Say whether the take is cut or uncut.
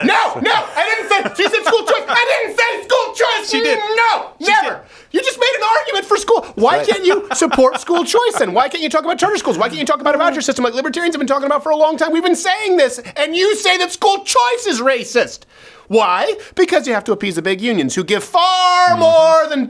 uncut